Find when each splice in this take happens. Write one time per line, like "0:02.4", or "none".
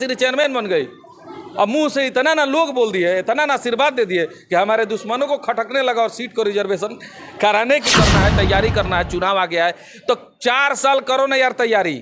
0:07.8